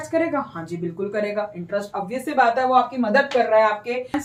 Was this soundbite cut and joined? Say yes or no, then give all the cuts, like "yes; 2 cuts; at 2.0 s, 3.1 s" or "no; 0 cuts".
no; 0 cuts